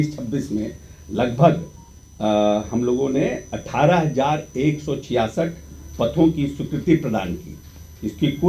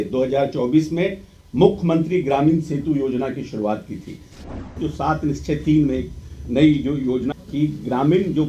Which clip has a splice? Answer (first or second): second